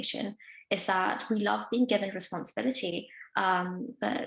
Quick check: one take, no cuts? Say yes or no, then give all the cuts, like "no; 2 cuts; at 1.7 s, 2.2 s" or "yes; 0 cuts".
yes; 0 cuts